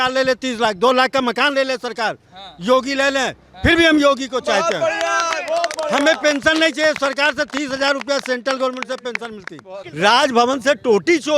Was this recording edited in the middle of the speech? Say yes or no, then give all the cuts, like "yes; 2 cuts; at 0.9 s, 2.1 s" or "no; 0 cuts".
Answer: yes; 1 cut; at 9.8 s